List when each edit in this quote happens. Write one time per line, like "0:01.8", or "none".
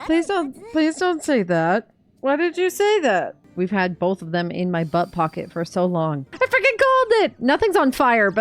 0:03.4
0:06.3